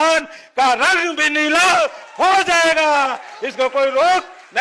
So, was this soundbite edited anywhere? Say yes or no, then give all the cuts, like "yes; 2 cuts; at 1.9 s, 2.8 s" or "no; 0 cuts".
no; 0 cuts